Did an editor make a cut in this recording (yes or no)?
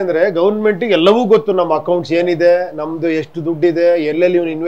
no